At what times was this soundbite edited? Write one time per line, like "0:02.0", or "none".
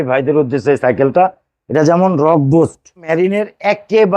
0:03.1